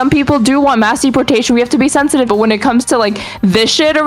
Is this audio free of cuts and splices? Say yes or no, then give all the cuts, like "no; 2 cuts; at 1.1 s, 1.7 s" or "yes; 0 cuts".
no; 1 cut; at 2.3 s